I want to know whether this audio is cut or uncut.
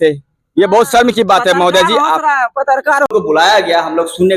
cut